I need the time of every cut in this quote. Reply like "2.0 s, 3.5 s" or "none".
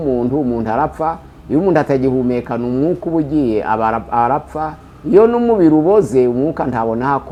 none